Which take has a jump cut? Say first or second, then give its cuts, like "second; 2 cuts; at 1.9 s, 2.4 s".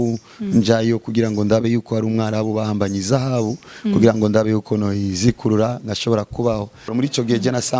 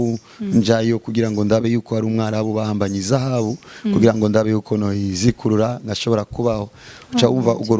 first; 1 cut; at 6.9 s